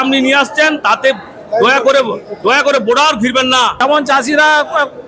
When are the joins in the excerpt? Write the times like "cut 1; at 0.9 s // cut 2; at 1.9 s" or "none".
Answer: cut 1; at 3.8 s